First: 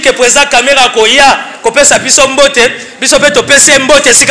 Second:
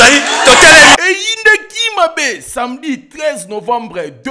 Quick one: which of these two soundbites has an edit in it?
second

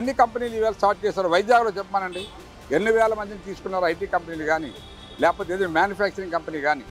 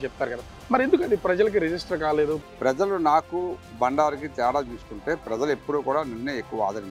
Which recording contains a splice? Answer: second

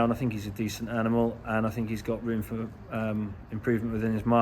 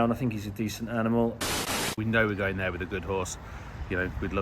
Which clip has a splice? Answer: second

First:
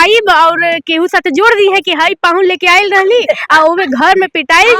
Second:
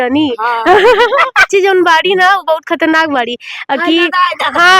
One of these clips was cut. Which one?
second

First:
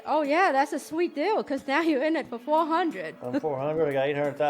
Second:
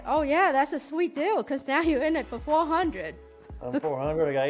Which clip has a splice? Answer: first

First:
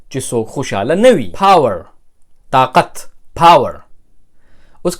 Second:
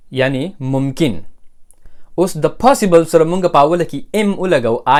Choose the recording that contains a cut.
first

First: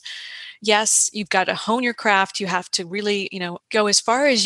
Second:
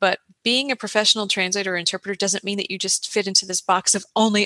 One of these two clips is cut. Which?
first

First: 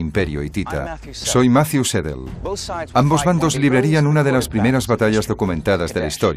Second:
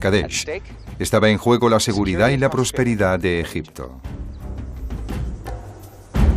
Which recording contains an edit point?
first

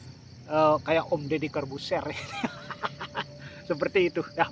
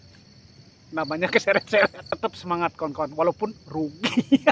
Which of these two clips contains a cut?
second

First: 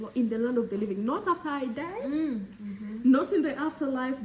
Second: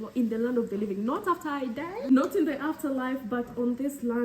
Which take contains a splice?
second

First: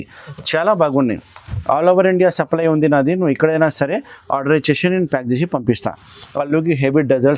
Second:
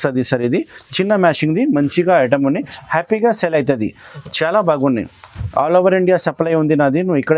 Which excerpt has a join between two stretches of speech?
first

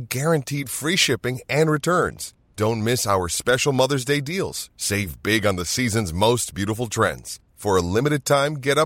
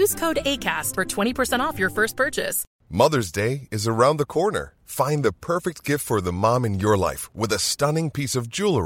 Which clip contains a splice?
second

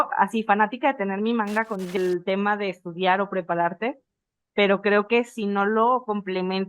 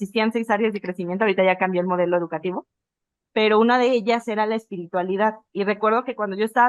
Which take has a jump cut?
first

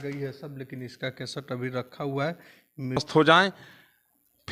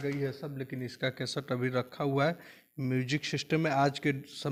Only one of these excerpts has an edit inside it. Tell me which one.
first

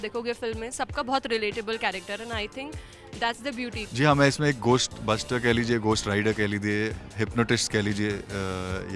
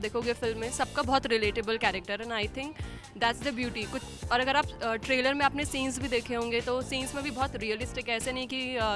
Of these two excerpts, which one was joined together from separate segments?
first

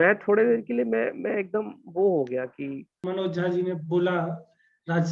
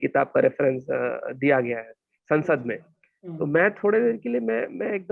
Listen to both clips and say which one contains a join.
first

